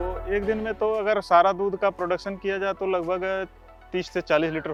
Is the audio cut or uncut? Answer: uncut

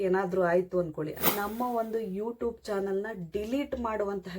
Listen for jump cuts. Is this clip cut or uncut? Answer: cut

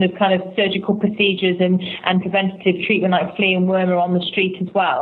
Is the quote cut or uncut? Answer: uncut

